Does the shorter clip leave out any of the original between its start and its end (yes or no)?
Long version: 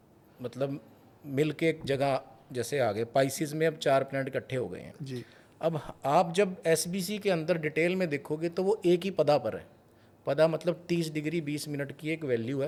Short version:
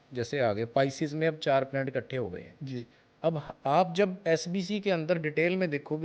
no